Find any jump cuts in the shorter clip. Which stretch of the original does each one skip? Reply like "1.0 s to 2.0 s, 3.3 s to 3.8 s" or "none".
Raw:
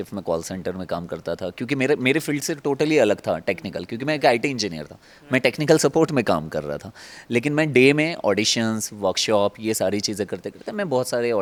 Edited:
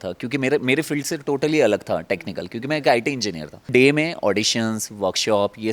5.1 s to 7.7 s